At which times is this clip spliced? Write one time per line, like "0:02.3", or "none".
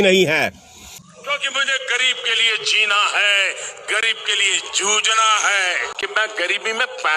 0:01.0
0:05.9

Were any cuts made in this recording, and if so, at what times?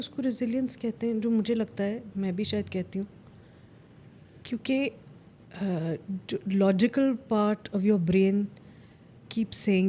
none

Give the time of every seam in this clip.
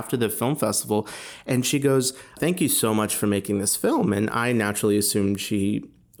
none

